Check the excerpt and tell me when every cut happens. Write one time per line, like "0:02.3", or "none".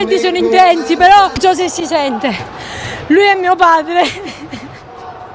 0:01.4